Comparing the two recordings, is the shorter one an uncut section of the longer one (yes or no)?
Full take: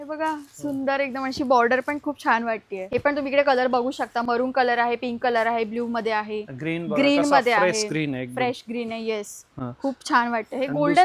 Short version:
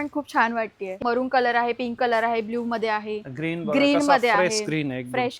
no